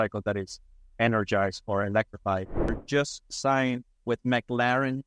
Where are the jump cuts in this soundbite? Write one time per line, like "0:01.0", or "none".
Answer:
0:02.8
0:03.9